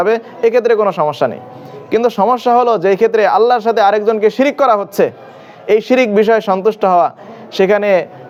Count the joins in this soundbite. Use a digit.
0